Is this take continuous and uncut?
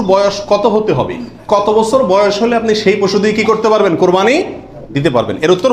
yes; 0 cuts

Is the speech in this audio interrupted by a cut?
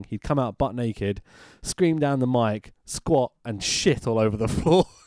no; 0 cuts

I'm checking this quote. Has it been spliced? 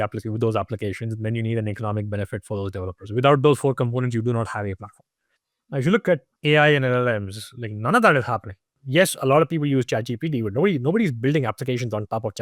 yes; 2 cuts; at 5.5 s, 6.3 s

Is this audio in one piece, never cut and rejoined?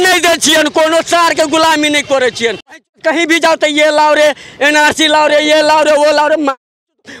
no; 1 cut; at 2.7 s

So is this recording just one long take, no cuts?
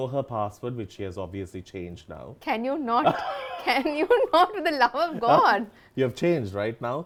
yes; 0 cuts

